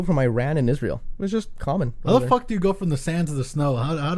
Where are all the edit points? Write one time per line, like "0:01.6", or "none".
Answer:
0:01.1